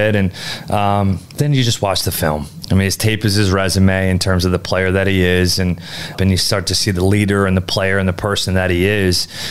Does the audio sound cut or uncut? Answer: cut